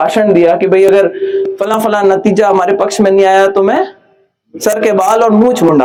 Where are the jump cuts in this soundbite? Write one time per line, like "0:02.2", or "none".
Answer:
none